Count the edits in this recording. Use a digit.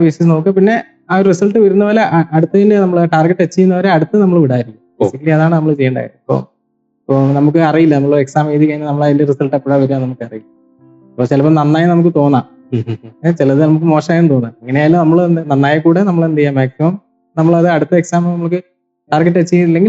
0